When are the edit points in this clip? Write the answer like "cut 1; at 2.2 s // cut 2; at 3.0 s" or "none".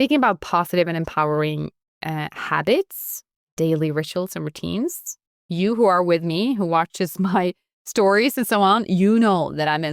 none